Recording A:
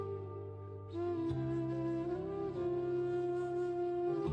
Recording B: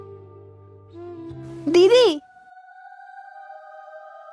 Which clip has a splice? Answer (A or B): A